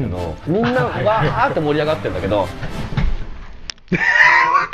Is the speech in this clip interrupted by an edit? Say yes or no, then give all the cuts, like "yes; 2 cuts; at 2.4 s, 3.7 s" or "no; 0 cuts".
no; 0 cuts